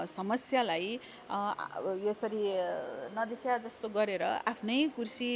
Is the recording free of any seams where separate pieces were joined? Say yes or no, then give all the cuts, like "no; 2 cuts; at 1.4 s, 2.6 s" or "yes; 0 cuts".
yes; 0 cuts